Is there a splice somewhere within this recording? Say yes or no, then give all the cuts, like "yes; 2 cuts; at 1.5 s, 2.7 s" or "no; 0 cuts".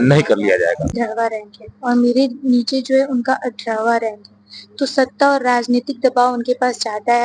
yes; 1 cut; at 0.9 s